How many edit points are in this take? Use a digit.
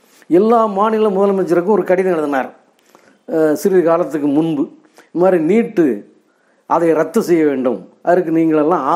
0